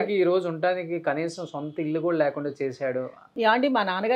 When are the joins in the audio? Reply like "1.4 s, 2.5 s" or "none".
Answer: 3.2 s